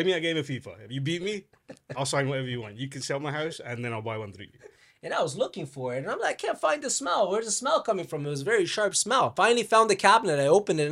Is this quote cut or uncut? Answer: cut